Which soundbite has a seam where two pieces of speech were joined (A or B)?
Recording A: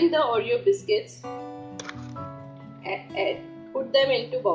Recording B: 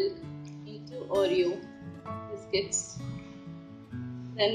A